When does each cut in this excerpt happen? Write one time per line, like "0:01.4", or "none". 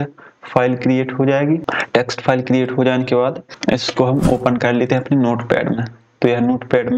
0:01.6
0:03.5